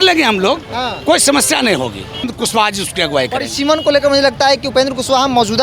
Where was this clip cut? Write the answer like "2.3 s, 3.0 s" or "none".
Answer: 2.3 s